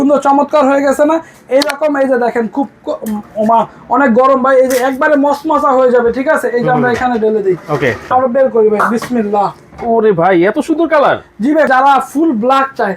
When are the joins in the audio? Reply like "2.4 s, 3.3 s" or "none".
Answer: 8.0 s, 11.7 s